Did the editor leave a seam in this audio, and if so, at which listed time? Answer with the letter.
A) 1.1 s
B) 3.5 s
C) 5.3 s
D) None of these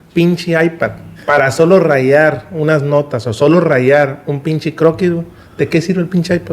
A